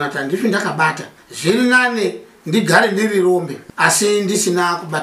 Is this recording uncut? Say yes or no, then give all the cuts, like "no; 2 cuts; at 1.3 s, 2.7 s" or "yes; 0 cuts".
no; 2 cuts; at 1.1 s, 3.6 s